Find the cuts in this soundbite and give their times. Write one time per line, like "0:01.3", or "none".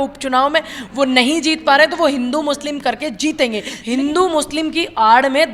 0:03.7